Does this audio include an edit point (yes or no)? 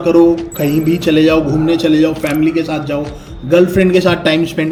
no